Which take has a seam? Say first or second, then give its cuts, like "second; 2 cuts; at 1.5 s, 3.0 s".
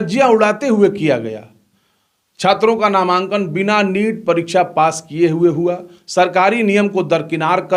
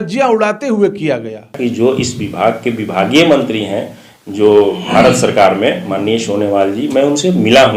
second; 1 cut; at 1.4 s